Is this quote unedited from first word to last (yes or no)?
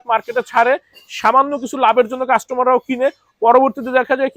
yes